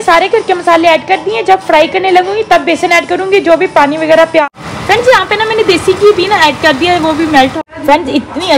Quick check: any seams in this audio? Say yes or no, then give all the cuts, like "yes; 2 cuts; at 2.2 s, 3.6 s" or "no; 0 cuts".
yes; 2 cuts; at 4.4 s, 7.5 s